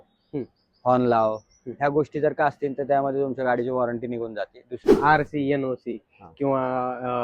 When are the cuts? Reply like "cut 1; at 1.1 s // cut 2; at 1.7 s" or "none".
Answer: cut 1; at 4.9 s